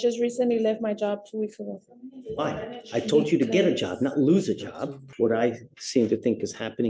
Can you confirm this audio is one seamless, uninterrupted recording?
no; 1 cut; at 5.0 s

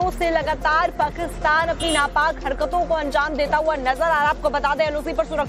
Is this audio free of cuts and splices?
no; 1 cut; at 0.9 s

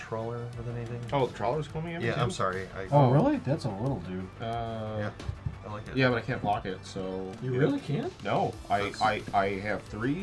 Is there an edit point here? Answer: no; 0 cuts

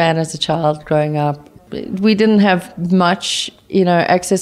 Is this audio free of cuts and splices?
no; 1 cut; at 1.5 s

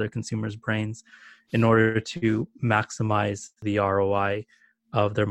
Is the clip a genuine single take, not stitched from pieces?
no; 1 cut; at 3.6 s

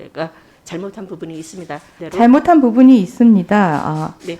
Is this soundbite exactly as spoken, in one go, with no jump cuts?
no; 1 cut; at 2.0 s

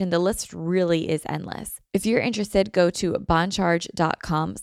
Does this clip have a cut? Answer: yes; 1 cut; at 1.7 s

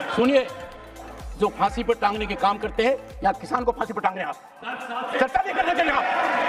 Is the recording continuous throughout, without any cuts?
yes; 0 cuts

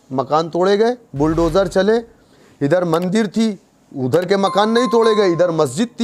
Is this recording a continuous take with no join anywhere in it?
yes; 0 cuts

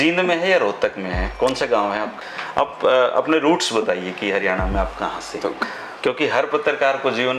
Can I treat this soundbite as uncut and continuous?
no; 2 cuts; at 2.2 s, 5.6 s

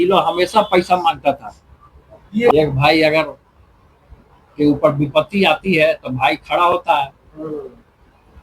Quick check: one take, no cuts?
no; 1 cut; at 2.5 s

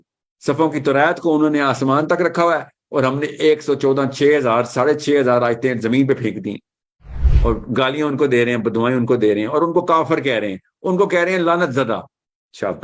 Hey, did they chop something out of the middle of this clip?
no; 0 cuts

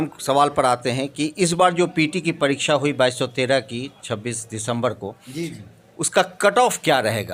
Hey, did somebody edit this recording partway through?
no; 0 cuts

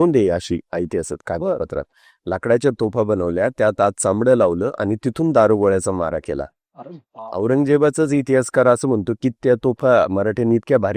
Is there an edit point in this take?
no; 0 cuts

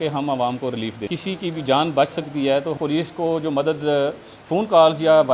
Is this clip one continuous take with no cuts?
no; 2 cuts; at 1.1 s, 2.7 s

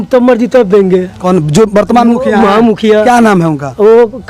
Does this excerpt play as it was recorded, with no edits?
yes; 0 cuts

